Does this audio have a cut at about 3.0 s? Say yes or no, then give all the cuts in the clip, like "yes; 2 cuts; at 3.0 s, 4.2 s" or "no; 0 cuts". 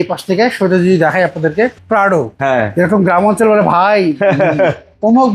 no; 1 cut; at 1.8 s